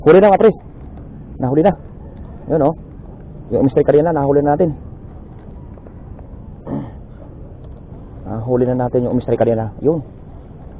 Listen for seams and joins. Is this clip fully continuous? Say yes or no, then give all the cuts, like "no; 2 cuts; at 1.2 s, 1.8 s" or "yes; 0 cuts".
yes; 0 cuts